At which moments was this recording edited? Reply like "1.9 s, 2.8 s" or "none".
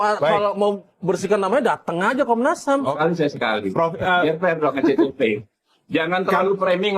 3.0 s